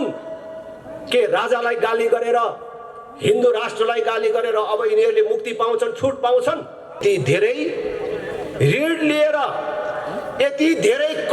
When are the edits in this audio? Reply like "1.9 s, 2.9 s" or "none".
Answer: 7.0 s